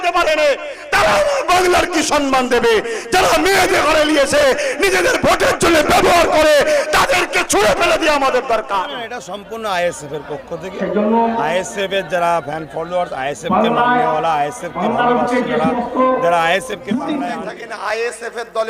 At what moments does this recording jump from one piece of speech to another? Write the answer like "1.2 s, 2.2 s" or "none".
9.3 s, 17.4 s